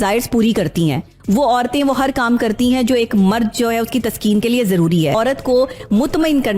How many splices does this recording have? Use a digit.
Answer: 1